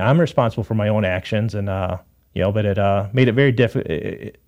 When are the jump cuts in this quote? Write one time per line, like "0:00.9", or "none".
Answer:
none